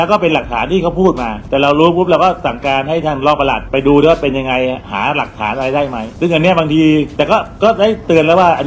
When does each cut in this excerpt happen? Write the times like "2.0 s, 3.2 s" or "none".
1.3 s, 3.6 s, 6.1 s, 7.1 s